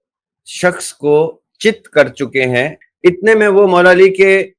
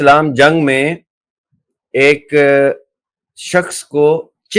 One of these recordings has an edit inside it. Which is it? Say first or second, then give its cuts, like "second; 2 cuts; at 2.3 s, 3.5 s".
first; 1 cut; at 2.8 s